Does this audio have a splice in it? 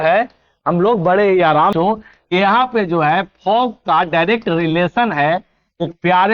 yes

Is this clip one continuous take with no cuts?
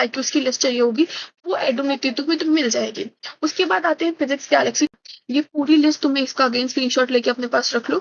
no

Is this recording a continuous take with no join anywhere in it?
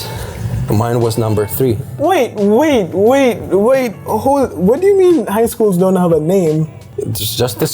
no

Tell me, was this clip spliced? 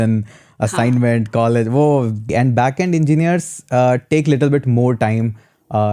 yes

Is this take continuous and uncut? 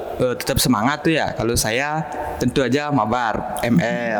yes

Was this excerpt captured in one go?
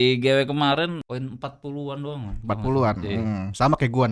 no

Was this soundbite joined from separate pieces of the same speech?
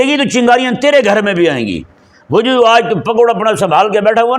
no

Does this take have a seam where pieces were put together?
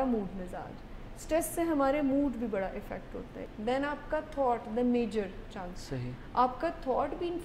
yes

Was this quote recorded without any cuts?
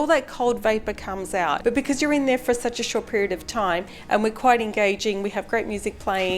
no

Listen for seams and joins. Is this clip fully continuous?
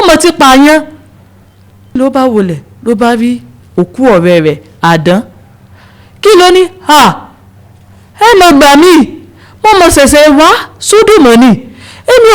no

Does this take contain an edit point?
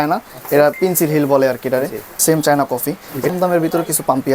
yes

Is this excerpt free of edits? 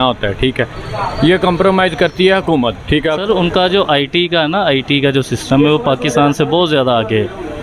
no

